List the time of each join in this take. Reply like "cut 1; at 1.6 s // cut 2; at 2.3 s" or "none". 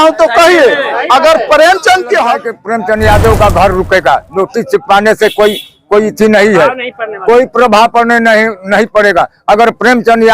cut 1; at 2.6 s